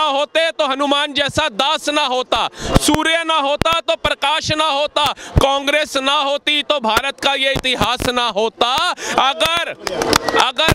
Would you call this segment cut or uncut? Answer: uncut